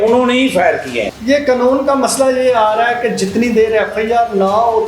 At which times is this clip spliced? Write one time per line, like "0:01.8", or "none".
0:01.1